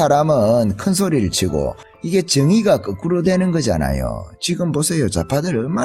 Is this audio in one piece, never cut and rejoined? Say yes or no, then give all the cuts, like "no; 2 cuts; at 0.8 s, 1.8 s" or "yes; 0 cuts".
yes; 0 cuts